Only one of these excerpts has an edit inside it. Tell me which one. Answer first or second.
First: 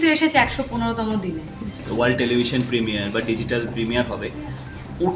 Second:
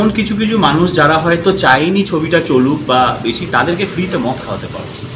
first